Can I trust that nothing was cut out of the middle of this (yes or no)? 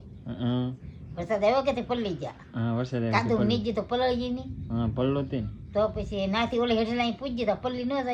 yes